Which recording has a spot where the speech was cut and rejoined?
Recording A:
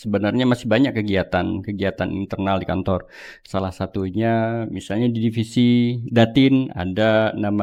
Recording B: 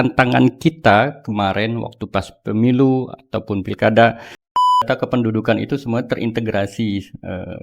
B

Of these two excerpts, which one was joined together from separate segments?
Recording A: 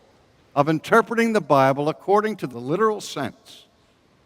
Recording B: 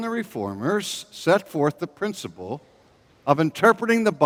A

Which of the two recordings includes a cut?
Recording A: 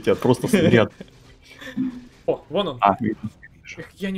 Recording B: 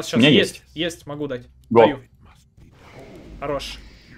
A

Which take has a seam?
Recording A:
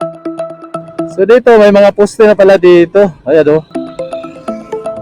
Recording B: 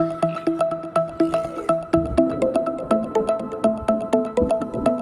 A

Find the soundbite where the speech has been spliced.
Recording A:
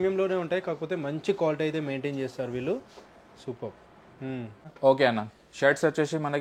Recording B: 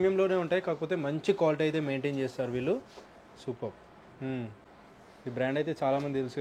A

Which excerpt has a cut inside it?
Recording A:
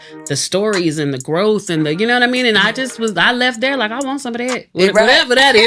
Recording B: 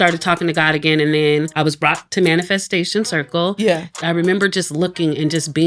B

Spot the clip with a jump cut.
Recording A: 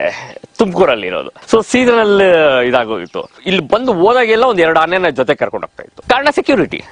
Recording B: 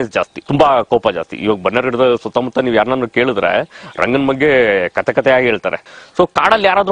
B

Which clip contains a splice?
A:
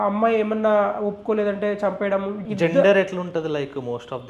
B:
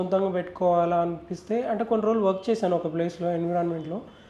A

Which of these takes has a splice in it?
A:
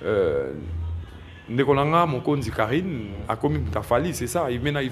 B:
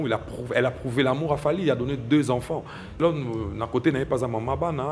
B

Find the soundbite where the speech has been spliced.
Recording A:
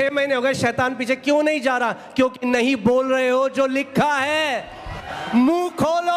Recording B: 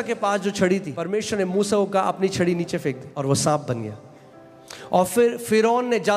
B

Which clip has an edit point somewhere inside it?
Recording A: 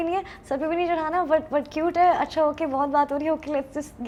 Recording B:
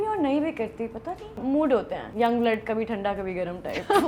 B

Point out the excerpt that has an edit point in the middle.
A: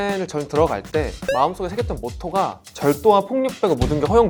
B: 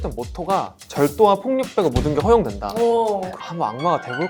B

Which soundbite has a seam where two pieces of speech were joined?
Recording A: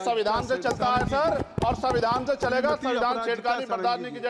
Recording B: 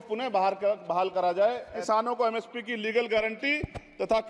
B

